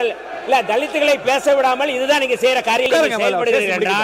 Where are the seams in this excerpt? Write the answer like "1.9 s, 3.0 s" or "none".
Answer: 2.9 s